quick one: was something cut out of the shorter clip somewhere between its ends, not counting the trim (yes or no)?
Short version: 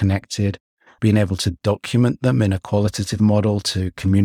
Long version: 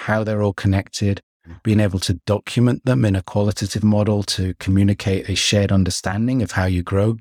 no